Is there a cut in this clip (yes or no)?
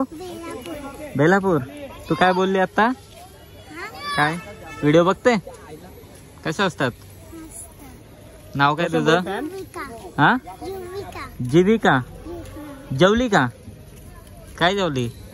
no